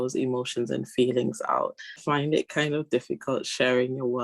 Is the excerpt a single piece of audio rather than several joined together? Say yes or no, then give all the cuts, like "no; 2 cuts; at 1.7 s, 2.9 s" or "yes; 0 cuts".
no; 1 cut; at 2.0 s